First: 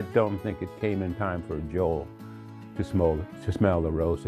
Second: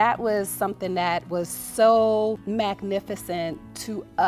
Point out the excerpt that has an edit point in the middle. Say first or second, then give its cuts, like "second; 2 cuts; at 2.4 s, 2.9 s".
second; 1 cut; at 2.4 s